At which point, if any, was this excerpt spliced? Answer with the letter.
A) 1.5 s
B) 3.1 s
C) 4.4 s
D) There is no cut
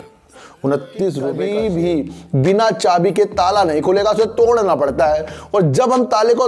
A